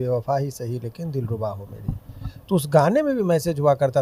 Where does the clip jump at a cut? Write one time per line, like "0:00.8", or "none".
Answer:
none